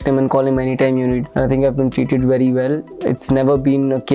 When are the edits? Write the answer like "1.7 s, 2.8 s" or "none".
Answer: 1.3 s